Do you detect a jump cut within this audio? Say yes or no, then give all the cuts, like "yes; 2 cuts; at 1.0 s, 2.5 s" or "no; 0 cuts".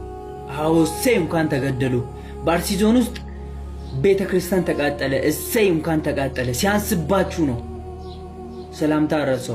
no; 0 cuts